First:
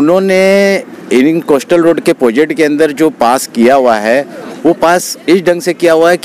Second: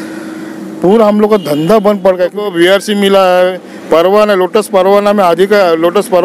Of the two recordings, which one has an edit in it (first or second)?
second